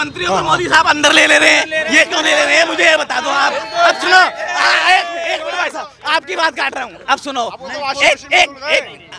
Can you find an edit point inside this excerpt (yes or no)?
no